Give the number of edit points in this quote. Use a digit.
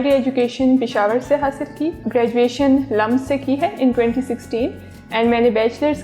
1